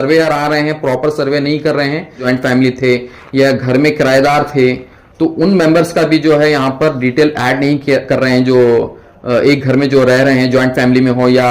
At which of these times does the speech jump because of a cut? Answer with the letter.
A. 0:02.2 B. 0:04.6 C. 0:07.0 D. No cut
A